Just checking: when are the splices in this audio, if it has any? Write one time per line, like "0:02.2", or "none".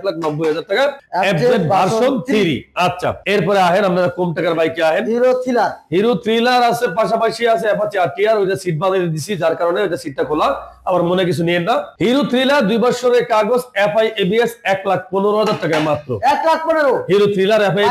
none